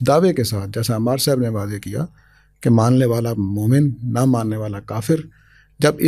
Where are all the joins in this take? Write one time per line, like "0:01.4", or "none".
none